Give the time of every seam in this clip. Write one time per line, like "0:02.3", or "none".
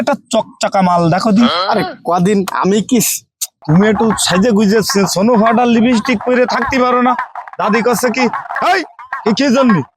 0:03.5